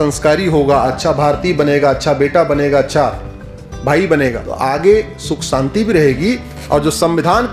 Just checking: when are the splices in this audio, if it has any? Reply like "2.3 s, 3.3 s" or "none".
4.5 s